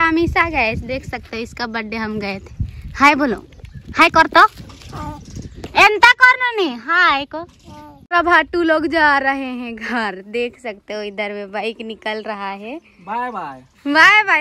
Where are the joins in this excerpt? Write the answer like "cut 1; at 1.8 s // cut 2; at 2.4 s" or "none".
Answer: cut 1; at 8.1 s